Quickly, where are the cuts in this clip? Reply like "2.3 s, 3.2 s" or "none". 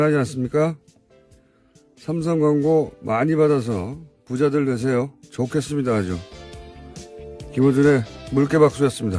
3.4 s